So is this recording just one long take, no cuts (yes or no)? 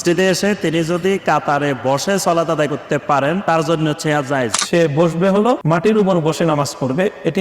no